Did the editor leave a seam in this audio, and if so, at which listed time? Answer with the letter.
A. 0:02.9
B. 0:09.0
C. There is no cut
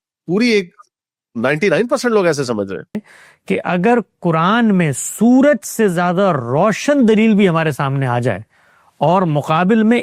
A